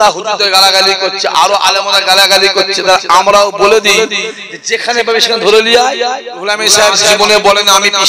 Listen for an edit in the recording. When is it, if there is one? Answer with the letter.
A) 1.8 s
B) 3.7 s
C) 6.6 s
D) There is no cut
C